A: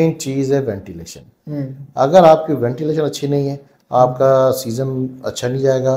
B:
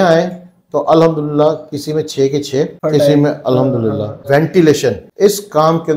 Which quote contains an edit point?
B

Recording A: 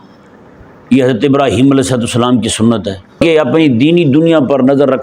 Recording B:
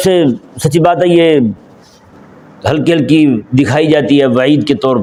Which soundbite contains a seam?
A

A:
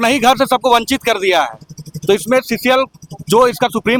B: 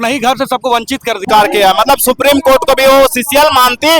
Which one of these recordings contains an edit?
B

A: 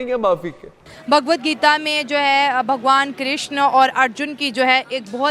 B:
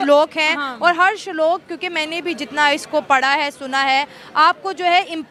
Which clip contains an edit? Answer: A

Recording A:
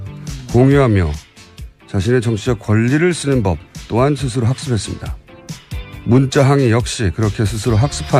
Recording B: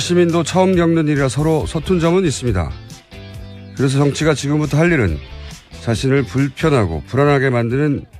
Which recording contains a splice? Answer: B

